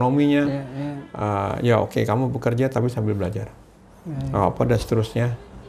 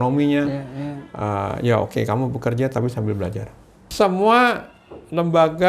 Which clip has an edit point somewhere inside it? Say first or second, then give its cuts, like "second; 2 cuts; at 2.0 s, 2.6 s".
second; 1 cut; at 3.8 s